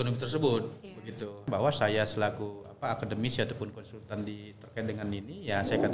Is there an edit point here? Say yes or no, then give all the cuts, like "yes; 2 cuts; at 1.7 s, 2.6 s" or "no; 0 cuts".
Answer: yes; 1 cut; at 1.5 s